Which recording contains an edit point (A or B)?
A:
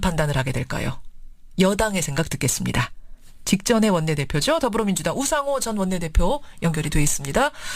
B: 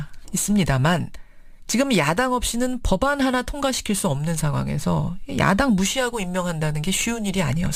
A